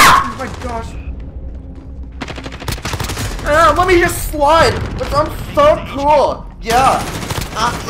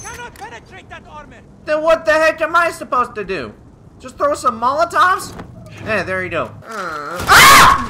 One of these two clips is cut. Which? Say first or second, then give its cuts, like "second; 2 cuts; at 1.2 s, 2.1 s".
second; 1 cut; at 6.6 s